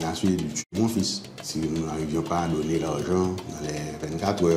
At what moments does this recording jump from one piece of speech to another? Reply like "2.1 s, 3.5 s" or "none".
1.4 s